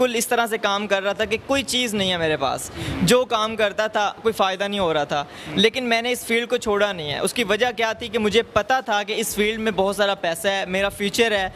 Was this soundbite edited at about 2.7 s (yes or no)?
no